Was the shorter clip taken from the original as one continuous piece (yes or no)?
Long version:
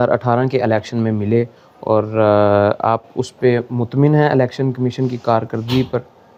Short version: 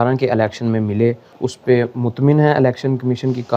no